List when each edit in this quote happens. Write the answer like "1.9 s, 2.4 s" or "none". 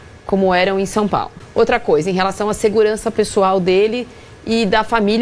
1.4 s